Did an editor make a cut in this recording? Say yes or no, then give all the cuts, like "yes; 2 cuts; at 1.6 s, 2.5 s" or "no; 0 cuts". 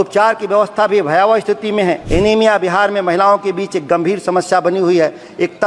yes; 1 cut; at 2.0 s